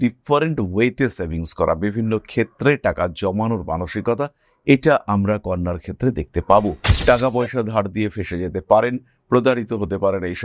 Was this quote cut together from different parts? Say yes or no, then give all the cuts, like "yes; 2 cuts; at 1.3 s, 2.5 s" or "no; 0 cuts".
yes; 1 cut; at 6.9 s